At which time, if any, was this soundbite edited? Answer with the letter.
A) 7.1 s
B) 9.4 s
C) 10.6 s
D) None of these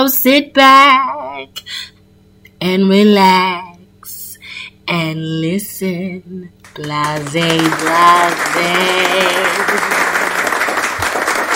B